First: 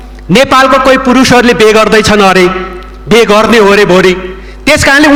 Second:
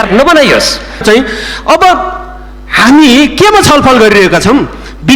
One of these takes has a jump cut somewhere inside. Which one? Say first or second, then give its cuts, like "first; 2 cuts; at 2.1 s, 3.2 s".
second; 1 cut; at 1.0 s